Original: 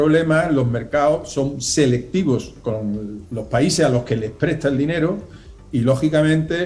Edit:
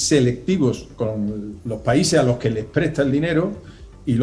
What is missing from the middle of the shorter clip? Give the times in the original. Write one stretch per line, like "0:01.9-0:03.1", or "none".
none